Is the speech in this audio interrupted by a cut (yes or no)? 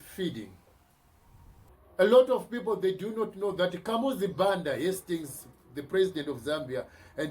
yes